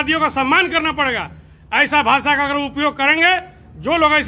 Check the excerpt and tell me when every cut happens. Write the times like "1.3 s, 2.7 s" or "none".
none